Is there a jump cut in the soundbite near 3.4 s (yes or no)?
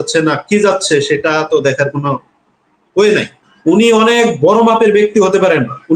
yes